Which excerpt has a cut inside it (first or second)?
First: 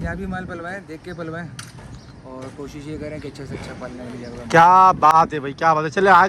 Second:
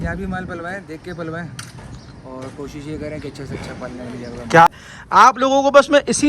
second